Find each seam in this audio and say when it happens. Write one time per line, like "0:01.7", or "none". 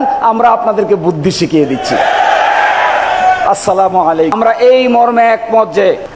0:04.3